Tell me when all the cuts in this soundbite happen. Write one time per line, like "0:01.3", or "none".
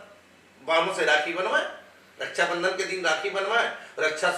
none